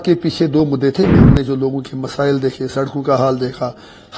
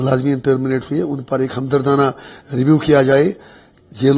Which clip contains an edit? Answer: first; 1 cut; at 1.1 s

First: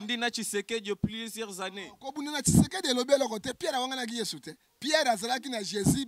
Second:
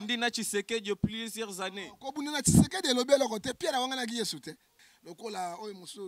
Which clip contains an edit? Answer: second; 1 cut; at 4.7 s

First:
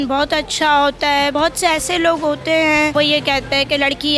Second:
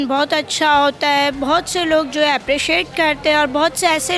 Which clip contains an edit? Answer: first; 2 cuts; at 1.3 s, 2.9 s

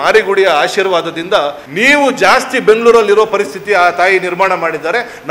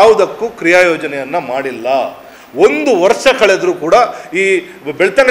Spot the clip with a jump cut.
first; 1 cut; at 1.6 s

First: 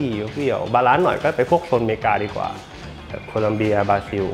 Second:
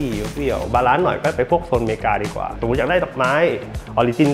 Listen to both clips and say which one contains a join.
second; 1 cut; at 2.6 s

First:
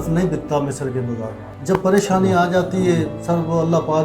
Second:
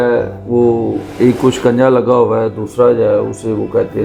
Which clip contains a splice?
first; 2 cuts; at 1.5 s, 3.2 s

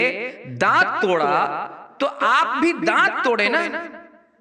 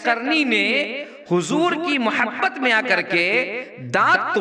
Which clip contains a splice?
first; 1 cut; at 2.9 s

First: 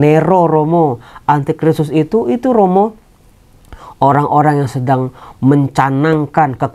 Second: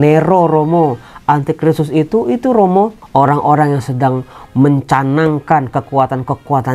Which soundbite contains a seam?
second; 1 cut; at 3.0 s

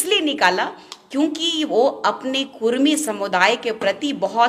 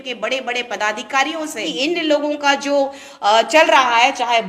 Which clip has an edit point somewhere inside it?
second; 1 cut; at 1.6 s

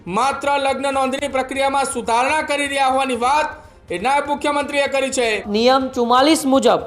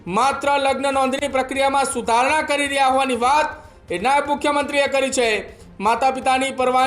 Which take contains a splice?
first; 1 cut; at 5.4 s

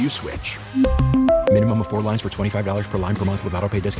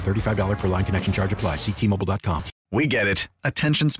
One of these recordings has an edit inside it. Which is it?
second; 1 cut; at 2.5 s

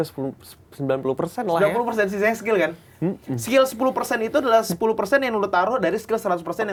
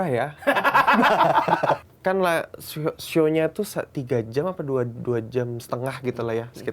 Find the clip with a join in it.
second; 1 cut; at 1.9 s

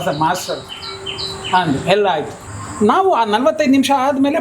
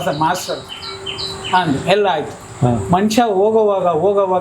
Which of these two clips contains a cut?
first; 1 cut; at 2.4 s

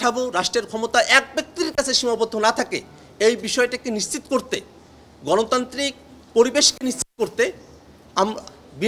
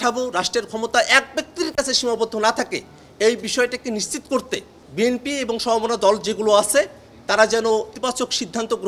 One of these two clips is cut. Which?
second; 2 cuts; at 4.8 s, 7.9 s

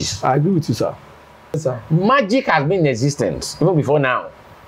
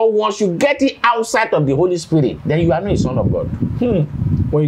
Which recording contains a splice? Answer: first; 1 cut; at 1.6 s

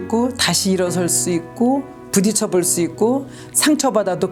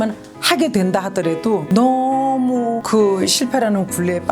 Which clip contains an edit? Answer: second; 2 cuts; at 1.6 s, 2.8 s

